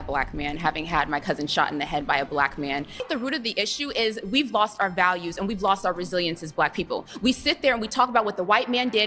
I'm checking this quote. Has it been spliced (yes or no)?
yes